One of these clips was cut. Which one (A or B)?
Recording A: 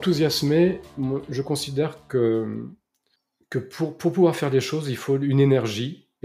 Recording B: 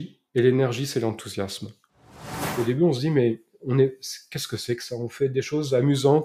B